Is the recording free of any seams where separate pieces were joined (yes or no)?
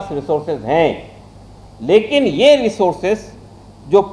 yes